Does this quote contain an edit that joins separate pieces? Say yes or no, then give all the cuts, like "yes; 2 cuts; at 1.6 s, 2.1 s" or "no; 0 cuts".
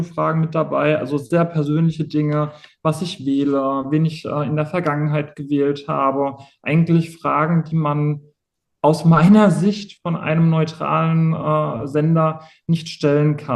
no; 0 cuts